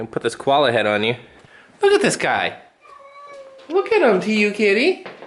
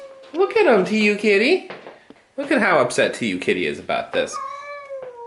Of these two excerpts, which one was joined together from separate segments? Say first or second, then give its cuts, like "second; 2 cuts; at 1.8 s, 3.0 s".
first; 1 cut; at 1.4 s